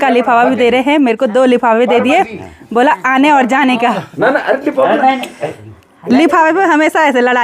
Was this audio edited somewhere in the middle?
yes; 1 cut; at 4.1 s

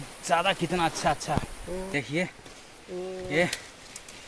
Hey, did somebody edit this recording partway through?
yes; 1 cut; at 1.9 s

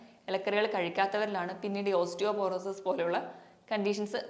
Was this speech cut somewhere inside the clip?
no; 0 cuts

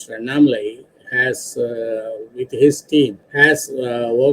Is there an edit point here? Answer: yes; 1 cut; at 3.2 s

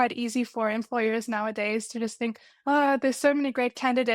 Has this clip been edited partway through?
no; 0 cuts

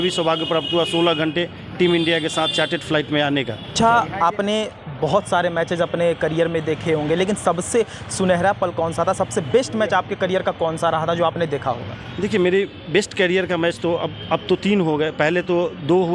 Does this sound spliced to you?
yes; 1 cut; at 3.7 s

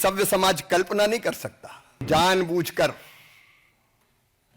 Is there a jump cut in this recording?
yes; 1 cut; at 2.0 s

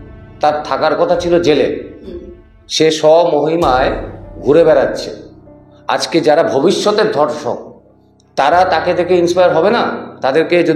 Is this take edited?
no; 0 cuts

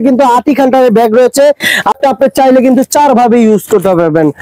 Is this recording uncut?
no; 1 cut; at 2.0 s

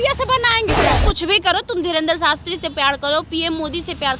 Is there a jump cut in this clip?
yes; 1 cut; at 1.0 s

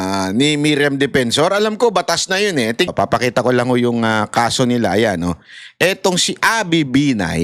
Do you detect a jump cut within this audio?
yes; 1 cut; at 2.9 s

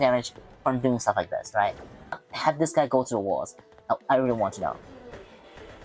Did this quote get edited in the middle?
yes; 1 cut; at 2.2 s

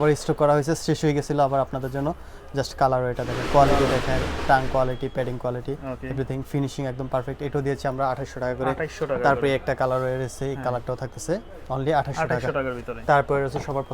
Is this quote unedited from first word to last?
yes; 0 cuts

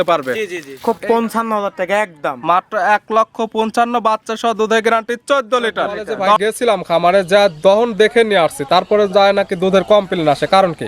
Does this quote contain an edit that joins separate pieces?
yes; 2 cuts; at 0.8 s, 6.4 s

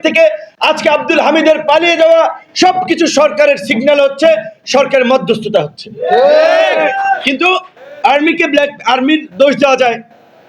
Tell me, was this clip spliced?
no; 0 cuts

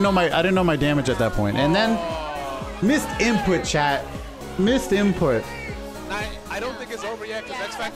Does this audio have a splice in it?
no; 0 cuts

